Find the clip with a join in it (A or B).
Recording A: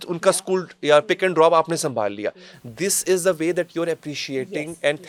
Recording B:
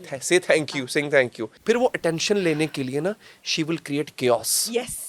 B